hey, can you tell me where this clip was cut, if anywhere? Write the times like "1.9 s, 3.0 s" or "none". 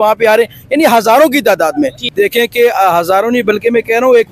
2.1 s